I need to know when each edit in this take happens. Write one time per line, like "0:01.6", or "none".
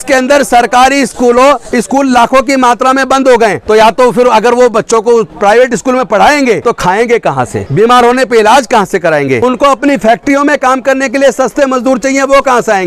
0:03.6
0:06.6
0:07.6
0:09.4